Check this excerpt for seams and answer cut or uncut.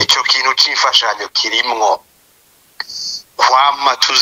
uncut